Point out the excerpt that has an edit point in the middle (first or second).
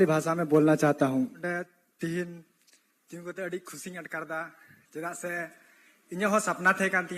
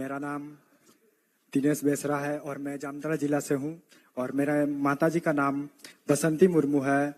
first